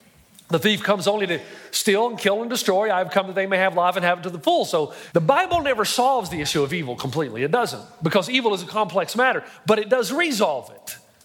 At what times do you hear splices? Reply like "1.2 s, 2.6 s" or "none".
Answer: 5.0 s